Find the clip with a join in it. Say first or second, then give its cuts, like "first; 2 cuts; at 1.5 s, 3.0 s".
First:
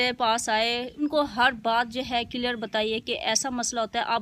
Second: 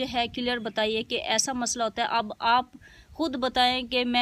first; 1 cut; at 1.0 s